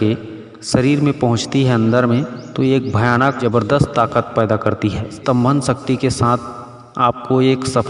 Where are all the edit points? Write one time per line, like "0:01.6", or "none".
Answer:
0:03.4
0:05.2

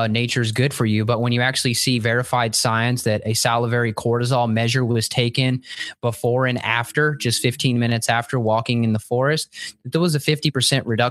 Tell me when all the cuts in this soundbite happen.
none

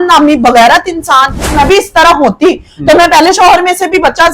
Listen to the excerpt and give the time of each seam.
0:01.6

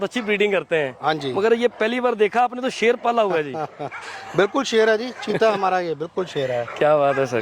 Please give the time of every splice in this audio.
none

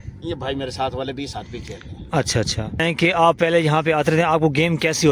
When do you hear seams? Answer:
0:02.8

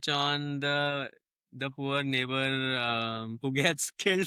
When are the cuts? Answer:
none

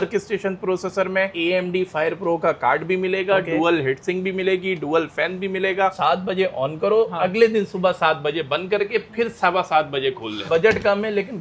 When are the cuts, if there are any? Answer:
0:01.3
0:05.9
0:10.5

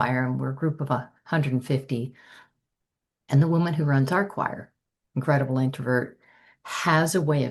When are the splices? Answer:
none

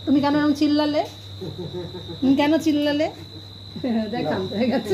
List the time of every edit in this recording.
none

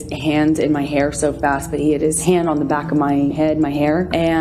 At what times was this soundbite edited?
0:02.2
0:03.5

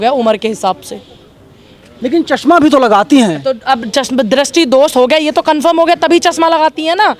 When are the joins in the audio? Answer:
none

